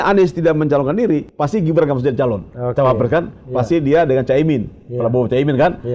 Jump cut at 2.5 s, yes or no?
no